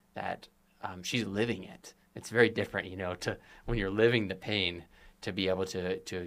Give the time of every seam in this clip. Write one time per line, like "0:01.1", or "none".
none